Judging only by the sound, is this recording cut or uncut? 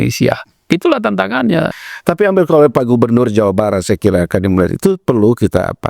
cut